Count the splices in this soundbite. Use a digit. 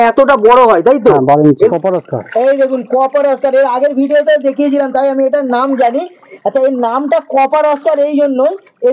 1